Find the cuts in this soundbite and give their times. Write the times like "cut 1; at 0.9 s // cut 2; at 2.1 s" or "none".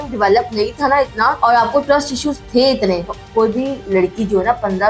cut 1; at 1.4 s // cut 2; at 3.1 s